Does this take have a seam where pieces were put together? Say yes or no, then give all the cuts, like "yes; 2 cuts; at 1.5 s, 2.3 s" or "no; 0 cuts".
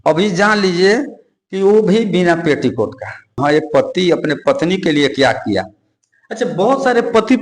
yes; 1 cut; at 3.4 s